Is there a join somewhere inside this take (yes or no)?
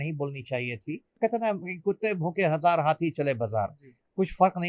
yes